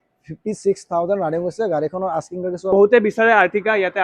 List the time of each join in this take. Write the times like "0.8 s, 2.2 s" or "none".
2.7 s